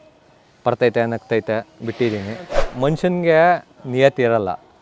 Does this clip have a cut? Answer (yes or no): yes